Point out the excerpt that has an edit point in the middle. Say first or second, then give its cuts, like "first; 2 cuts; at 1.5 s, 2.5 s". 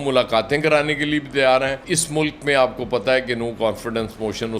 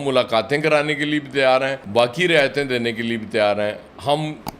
first; 1 cut; at 1.8 s